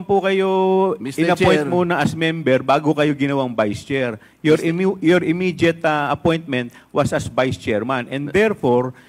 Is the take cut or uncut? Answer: uncut